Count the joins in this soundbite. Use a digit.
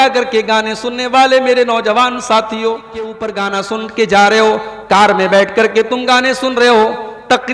1